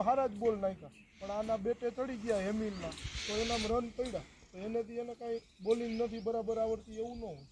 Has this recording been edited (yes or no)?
no